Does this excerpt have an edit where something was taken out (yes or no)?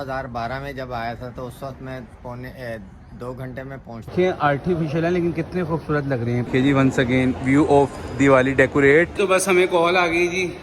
yes